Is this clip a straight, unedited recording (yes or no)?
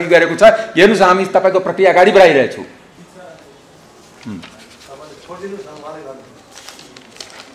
yes